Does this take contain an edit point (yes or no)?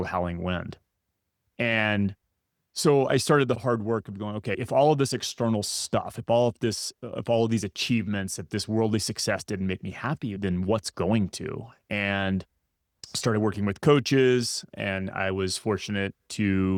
no